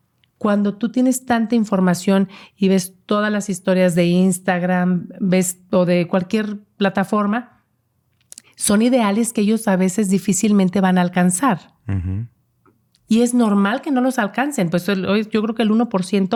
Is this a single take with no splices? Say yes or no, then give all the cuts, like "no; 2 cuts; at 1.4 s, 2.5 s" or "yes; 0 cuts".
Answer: yes; 0 cuts